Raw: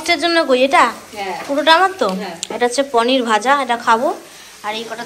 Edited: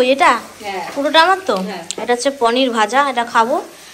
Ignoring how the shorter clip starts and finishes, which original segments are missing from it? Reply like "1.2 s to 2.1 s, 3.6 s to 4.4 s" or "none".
none

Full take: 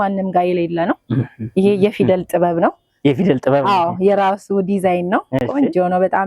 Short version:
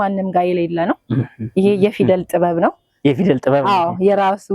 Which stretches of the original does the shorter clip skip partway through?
none

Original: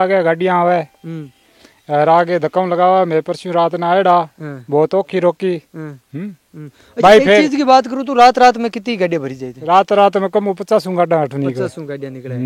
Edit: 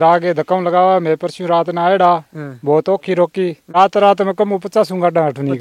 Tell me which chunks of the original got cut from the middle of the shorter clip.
5.7 s to 9.6 s

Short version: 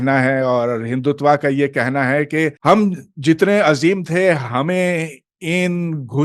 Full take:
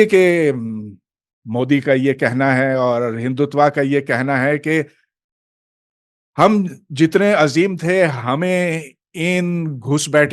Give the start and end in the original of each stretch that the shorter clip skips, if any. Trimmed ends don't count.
4.9 s to 6.3 s

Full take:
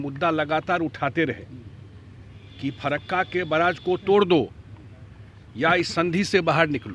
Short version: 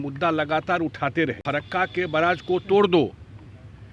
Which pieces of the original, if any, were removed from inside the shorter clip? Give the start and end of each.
1.4 s to 2.8 s

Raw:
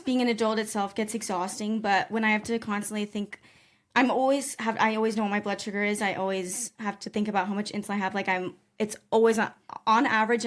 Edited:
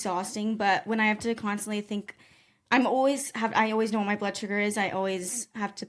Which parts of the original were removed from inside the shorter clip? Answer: none

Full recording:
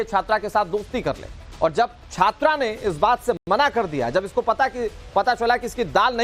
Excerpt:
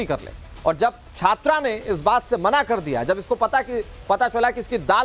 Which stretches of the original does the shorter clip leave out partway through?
3.4 s to 3.5 s

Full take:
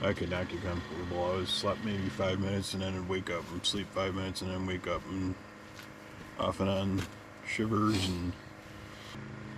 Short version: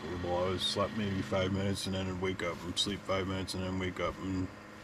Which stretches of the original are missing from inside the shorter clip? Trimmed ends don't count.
none

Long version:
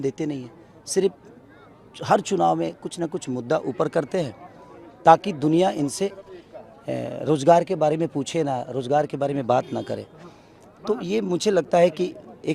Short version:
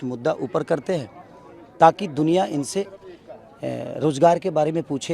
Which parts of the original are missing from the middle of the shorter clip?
none

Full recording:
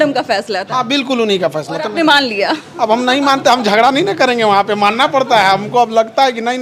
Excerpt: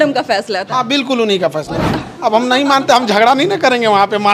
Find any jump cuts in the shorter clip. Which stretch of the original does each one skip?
1.9 s to 2.5 s

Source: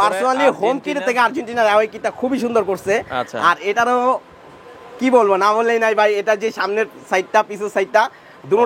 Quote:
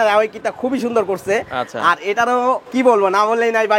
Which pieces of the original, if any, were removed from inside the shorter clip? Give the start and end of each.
4.2 s to 4.9 s

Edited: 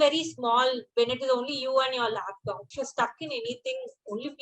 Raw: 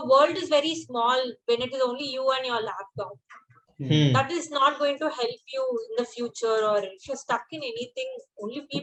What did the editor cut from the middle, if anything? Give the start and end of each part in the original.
3.3 s to 7.1 s

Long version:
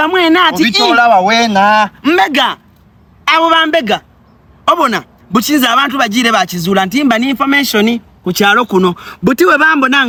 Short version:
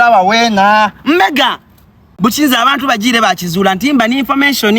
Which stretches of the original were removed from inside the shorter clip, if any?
3.0 s to 5.1 s

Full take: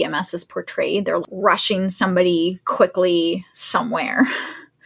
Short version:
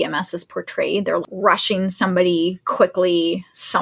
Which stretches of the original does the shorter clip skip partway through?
none

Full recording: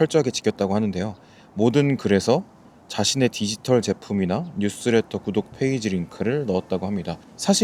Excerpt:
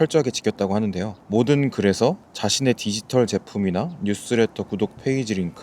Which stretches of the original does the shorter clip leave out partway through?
1.1 s to 1.4 s, 2.5 s to 2.8 s

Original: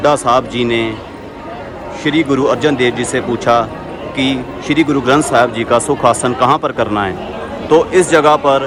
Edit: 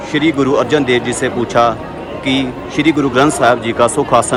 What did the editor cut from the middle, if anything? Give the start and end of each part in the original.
none

